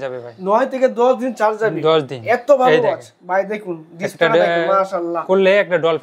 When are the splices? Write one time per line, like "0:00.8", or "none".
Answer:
none